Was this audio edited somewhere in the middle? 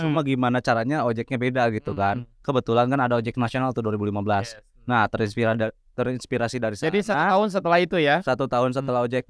no; 0 cuts

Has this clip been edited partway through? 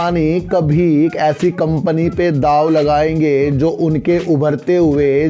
no; 0 cuts

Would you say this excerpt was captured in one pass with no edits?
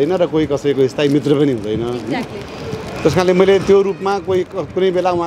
yes; 0 cuts

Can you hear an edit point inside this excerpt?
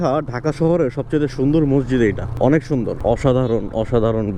no; 0 cuts

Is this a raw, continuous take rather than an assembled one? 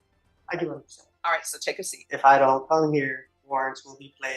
no; 2 cuts; at 2.0 s, 3.3 s

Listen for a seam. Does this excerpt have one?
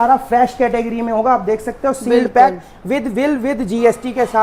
no; 0 cuts

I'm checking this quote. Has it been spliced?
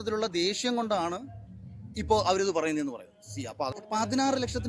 yes; 1 cut; at 3.7 s

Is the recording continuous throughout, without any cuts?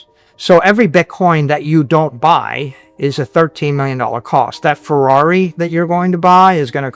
yes; 0 cuts

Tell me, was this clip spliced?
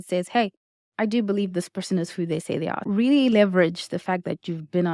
yes; 1 cut; at 2.8 s

